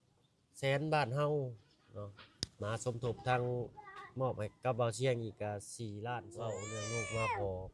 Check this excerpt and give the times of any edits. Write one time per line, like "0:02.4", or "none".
0:06.3